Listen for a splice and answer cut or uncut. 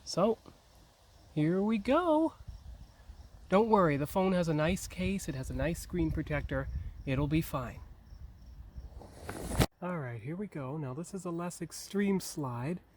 cut